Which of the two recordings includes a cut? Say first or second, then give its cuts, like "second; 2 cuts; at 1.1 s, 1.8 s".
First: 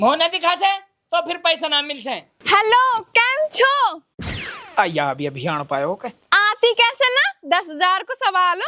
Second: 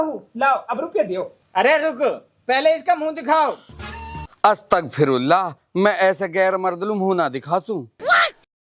first; 1 cut; at 2.3 s